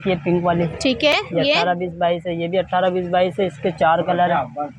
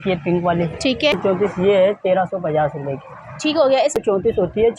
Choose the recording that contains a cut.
second; 2 cuts; at 1.1 s, 4.0 s

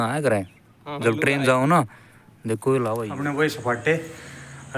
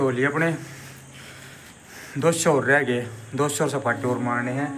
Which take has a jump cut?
first; 1 cut; at 2.9 s

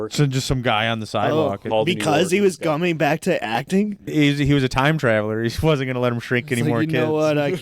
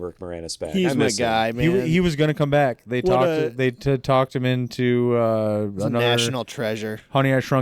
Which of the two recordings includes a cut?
first; 2 cuts; at 1.6 s, 4.0 s

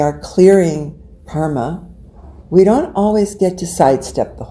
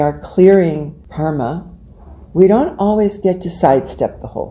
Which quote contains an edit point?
second; 1 cut; at 1.0 s

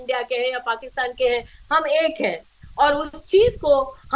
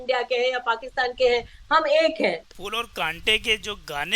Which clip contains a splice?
second; 1 cut; at 2.6 s

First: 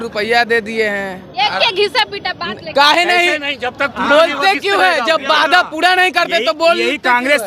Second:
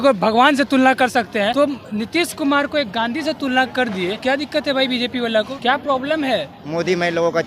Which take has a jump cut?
second; 4 cuts; at 1.5 s, 4.2 s, 5.5 s, 6.6 s

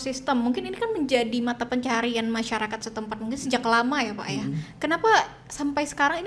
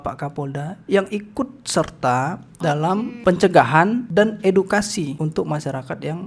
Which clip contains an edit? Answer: second; 3 cuts; at 3.1 s, 4.0 s, 5.1 s

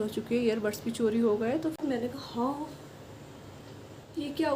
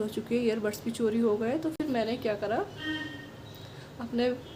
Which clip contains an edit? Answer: first; 1 cut; at 1.8 s

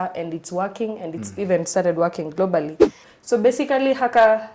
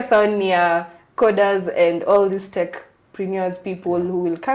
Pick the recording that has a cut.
first; 1 cut; at 3.1 s

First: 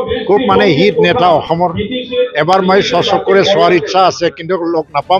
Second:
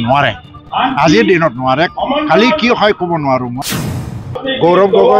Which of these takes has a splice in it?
second; 1 cut; at 3.9 s

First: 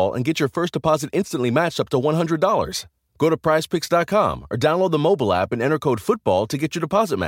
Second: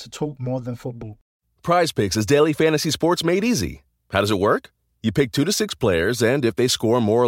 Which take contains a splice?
second; 1 cut; at 1.1 s

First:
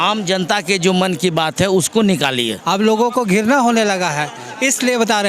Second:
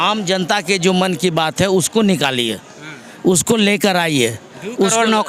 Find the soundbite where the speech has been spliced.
first; 1 cut; at 2.6 s

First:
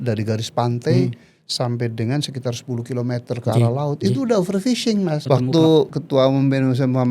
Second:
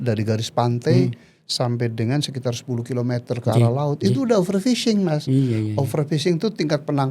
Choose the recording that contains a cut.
first; 1 cut; at 5.2 s

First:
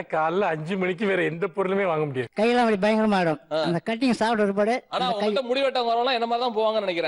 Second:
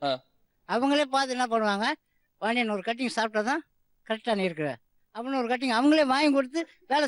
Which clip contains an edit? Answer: first; 1 cut; at 2.2 s

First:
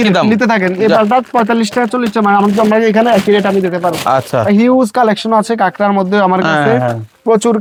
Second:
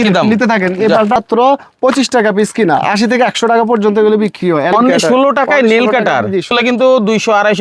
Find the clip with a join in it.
second; 3 cuts; at 1.2 s, 4.7 s, 6.5 s

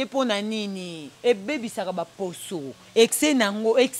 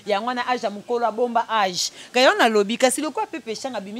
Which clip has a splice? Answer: first; 1 cut; at 1.1 s

